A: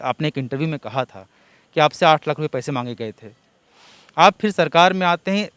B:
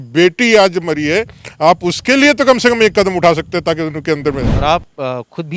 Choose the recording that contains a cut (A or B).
B